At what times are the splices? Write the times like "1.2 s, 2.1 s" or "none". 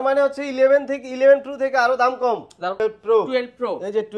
2.8 s

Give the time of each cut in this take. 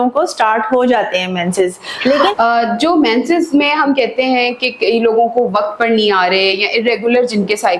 2.3 s

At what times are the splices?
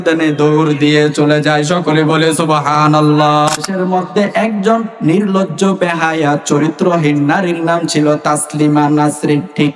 3.7 s

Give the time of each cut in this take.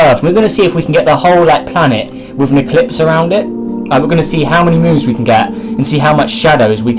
5.2 s

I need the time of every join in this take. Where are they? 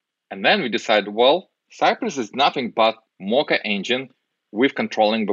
1.6 s, 3.1 s

